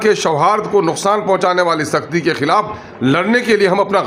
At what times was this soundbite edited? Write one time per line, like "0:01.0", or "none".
none